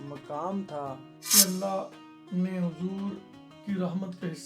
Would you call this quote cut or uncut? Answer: cut